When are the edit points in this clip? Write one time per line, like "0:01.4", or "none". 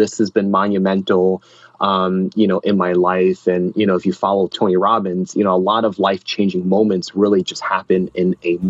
0:04.5